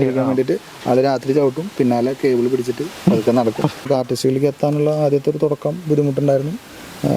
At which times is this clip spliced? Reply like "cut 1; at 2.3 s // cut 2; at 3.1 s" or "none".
cut 1; at 3.8 s

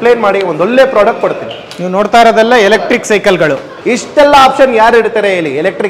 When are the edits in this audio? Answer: cut 1; at 3.7 s

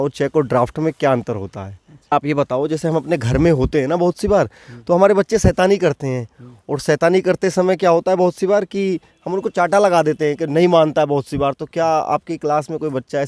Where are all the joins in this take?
cut 1; at 2.1 s

